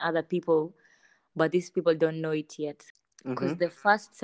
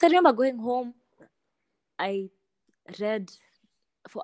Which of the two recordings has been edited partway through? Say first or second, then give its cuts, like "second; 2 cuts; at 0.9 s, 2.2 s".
first; 1 cut; at 2.9 s